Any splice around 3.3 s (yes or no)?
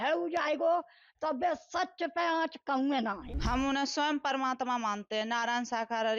yes